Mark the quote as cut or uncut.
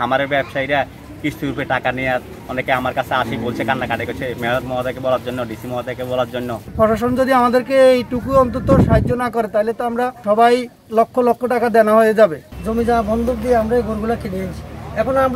cut